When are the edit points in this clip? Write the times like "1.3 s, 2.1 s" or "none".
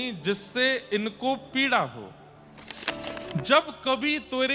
2.9 s